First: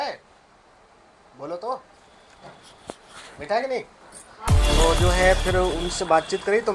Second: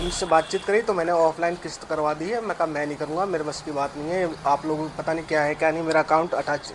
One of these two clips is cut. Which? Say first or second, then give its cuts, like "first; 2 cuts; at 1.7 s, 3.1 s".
first; 1 cut; at 4.4 s